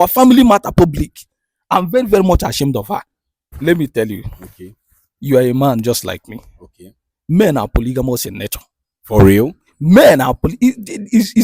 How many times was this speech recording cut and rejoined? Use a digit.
1